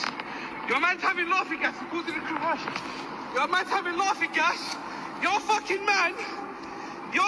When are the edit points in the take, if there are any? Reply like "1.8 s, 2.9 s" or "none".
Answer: none